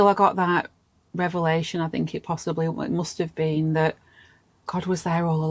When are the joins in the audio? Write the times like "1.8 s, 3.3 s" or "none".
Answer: none